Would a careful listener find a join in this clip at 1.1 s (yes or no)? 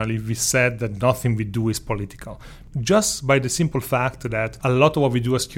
no